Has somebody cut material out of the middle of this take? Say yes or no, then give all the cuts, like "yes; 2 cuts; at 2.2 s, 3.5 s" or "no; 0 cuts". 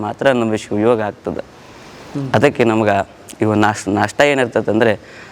no; 0 cuts